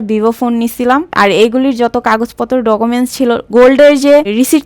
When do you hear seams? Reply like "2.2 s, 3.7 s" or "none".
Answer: 1.1 s